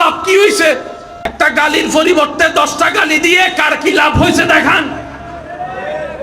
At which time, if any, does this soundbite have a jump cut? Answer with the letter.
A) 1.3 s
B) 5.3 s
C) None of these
A